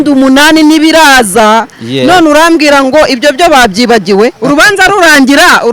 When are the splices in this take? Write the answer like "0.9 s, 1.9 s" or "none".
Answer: 4.4 s